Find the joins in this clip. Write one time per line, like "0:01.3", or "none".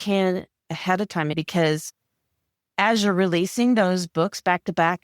0:01.3